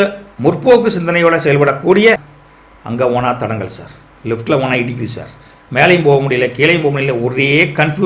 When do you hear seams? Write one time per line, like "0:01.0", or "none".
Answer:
0:02.2